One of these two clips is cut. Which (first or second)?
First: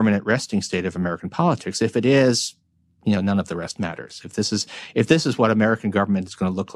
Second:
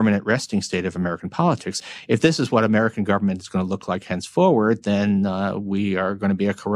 second